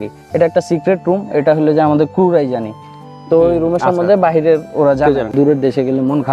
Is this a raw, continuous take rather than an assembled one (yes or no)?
no